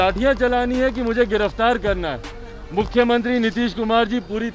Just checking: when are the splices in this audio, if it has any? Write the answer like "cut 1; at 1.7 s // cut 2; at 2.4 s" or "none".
none